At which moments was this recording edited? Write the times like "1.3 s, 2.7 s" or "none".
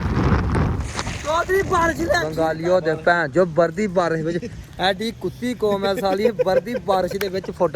2.3 s